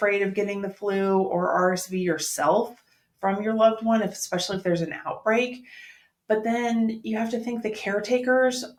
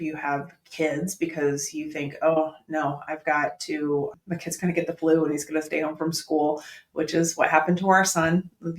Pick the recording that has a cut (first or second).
second